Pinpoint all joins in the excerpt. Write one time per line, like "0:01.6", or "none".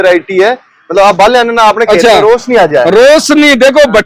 none